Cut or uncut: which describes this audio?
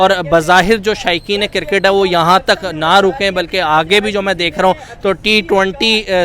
uncut